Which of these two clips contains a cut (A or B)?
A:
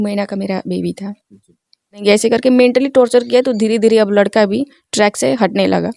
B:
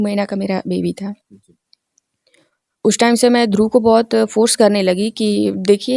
A